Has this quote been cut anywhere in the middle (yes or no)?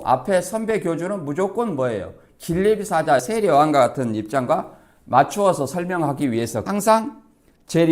yes